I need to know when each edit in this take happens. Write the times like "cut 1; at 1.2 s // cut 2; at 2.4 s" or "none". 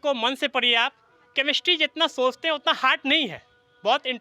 none